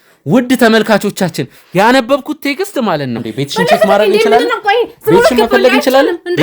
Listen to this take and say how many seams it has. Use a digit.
1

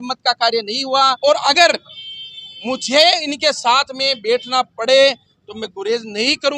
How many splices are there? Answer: 1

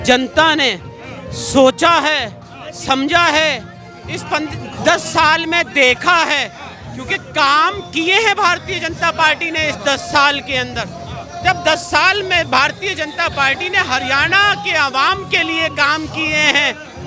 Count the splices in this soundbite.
0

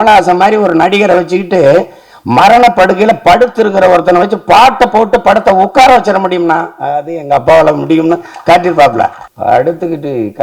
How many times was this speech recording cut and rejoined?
1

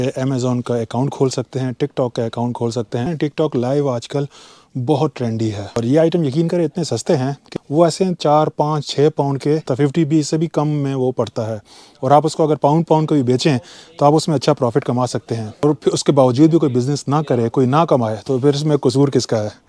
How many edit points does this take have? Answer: 5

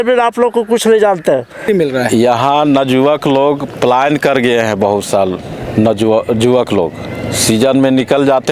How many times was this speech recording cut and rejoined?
1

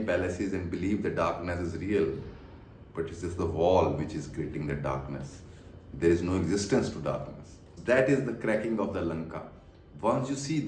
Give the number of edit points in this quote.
1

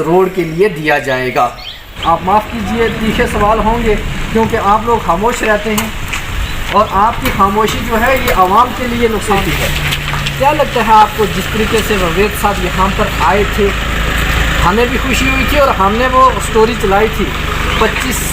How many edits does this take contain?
2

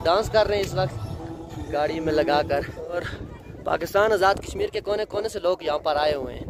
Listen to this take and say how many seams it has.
1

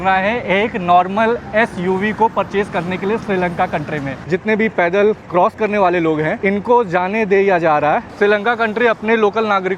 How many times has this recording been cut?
3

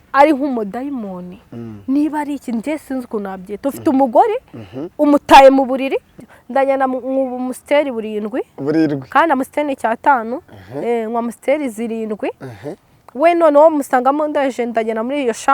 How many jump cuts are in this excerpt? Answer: 1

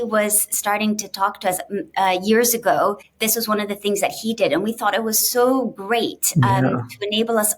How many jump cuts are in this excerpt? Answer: 1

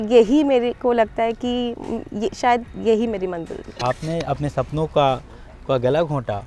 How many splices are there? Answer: 1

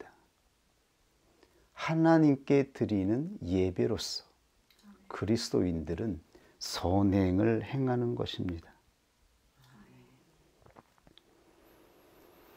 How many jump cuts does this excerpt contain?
1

